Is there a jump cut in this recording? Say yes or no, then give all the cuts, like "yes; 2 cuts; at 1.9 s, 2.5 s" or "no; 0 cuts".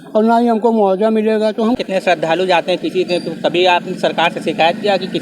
yes; 1 cut; at 1.8 s